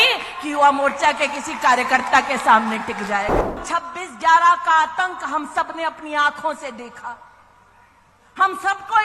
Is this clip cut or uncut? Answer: cut